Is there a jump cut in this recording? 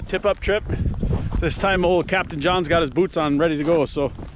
no; 0 cuts

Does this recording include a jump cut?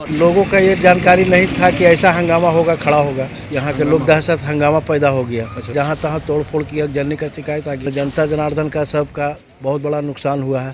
yes; 3 cuts; at 3.4 s, 5.7 s, 7.9 s

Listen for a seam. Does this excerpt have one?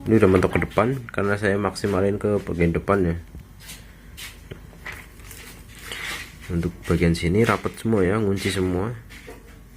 no; 0 cuts

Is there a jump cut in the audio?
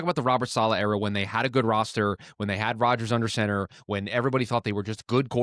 no; 0 cuts

